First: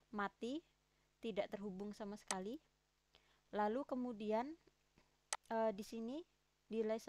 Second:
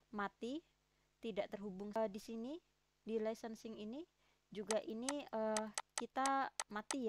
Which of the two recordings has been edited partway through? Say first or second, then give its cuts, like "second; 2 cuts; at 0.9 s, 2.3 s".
second; 1 cut; at 2.0 s